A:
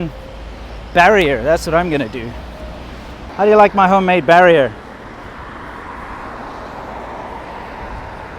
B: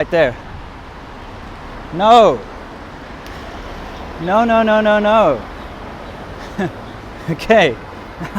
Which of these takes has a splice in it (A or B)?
A